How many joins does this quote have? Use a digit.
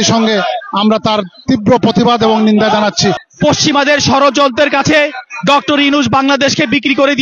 1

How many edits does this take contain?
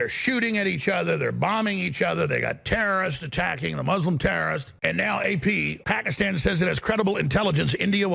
2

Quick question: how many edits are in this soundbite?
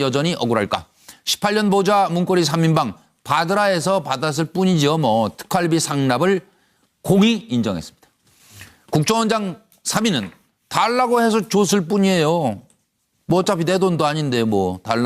1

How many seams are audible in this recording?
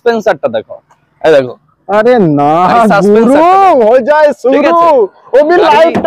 0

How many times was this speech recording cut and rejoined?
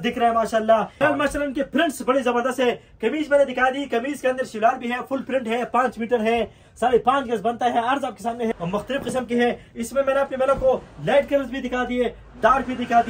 2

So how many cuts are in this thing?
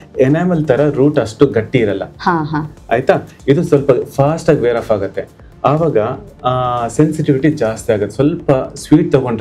0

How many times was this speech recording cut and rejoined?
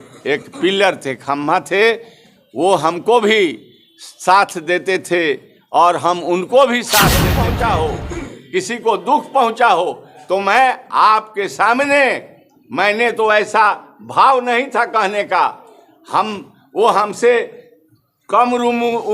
1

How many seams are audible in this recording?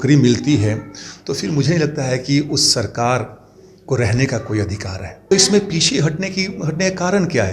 1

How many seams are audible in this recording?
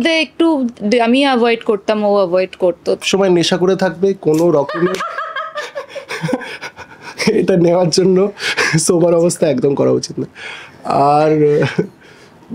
1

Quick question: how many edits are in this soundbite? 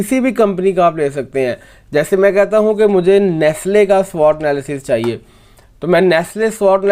0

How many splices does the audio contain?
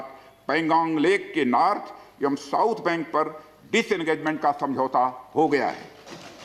0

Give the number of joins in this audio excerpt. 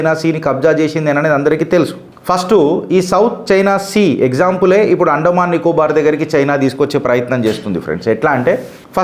0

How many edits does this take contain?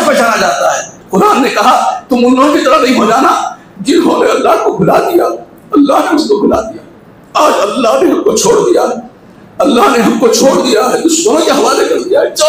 1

